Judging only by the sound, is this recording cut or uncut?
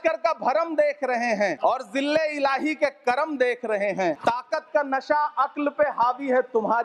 cut